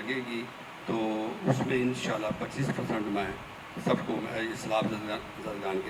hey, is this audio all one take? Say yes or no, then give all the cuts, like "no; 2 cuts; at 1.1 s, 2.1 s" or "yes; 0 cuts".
yes; 0 cuts